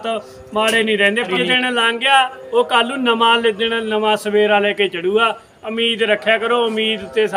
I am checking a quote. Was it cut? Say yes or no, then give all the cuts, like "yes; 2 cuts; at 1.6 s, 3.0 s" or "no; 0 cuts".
yes; 1 cut; at 1.3 s